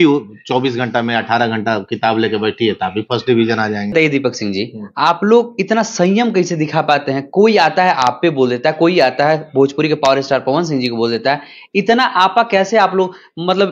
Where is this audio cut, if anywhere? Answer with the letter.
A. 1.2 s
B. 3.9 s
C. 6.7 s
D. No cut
B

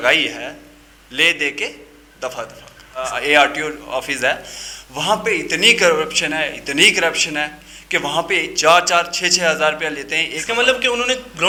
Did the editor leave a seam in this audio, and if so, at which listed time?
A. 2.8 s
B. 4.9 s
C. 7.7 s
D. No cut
D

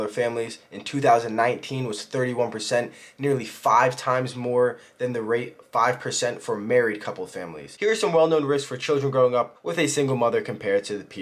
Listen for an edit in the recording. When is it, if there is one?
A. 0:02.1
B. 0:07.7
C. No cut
B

